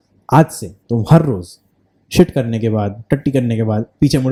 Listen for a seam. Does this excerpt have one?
no; 0 cuts

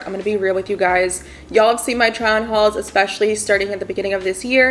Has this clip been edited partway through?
no; 0 cuts

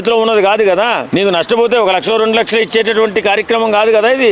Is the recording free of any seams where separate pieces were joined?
no; 1 cut; at 1.0 s

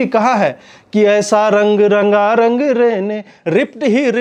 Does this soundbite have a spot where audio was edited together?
no; 0 cuts

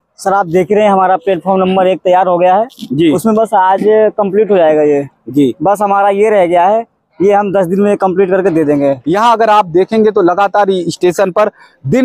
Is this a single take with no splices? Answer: no; 1 cut; at 9.0 s

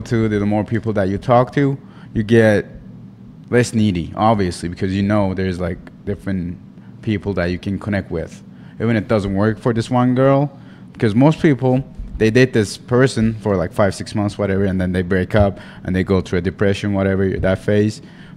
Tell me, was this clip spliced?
no; 0 cuts

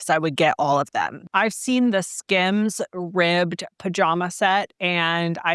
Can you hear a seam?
yes; 1 cut; at 1.2 s

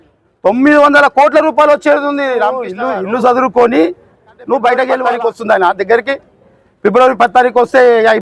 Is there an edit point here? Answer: yes; 2 cuts; at 2.7 s, 5.1 s

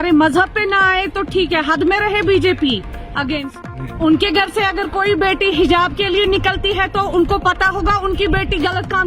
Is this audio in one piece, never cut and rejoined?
no; 1 cut; at 3.9 s

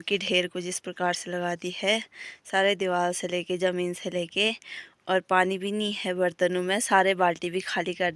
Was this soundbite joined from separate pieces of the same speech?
no; 0 cuts

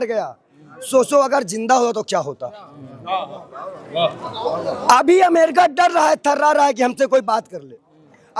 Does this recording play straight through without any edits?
yes; 0 cuts

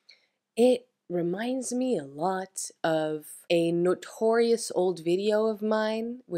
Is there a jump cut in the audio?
yes; 1 cut; at 3.3 s

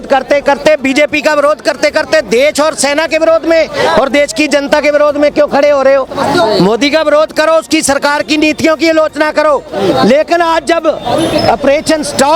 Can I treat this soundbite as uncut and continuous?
yes; 0 cuts

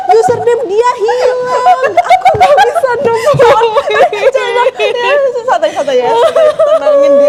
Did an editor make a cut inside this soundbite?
no; 0 cuts

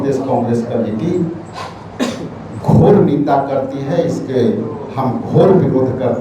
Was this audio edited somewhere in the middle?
no; 0 cuts

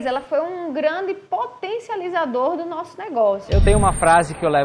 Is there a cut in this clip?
yes; 1 cut; at 3.4 s

